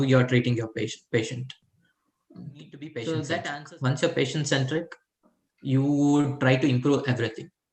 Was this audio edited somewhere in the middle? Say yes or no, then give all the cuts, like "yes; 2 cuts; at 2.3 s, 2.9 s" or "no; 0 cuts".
yes; 1 cut; at 3.5 s